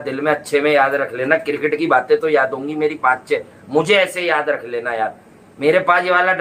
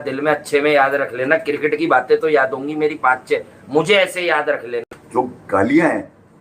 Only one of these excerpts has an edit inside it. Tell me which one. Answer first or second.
second